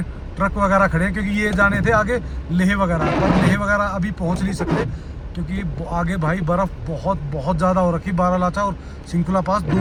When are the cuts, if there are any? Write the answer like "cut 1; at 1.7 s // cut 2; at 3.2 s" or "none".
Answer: none

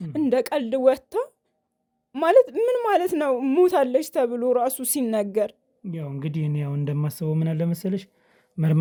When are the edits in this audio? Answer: none

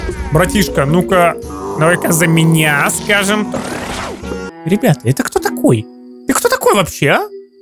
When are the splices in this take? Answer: cut 1; at 4.5 s

